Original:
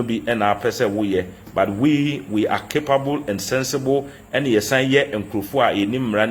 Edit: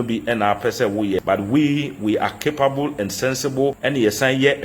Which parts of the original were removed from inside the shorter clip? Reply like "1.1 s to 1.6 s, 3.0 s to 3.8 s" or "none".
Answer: 1.2 s to 1.5 s, 4.1 s to 4.3 s